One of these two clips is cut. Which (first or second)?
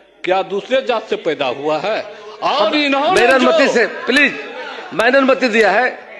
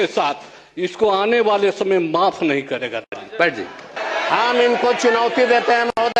second